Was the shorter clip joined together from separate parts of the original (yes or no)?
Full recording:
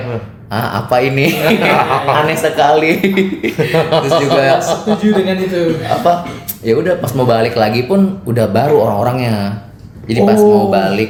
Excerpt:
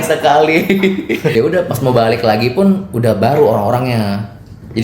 yes